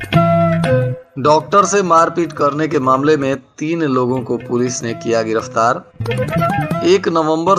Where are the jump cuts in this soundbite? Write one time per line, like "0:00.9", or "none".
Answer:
0:01.0